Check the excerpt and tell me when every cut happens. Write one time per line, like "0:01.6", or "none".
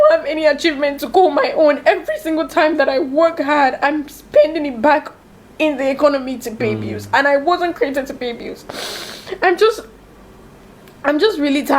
none